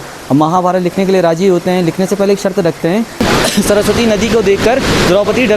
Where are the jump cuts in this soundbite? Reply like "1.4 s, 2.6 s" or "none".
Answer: 3.2 s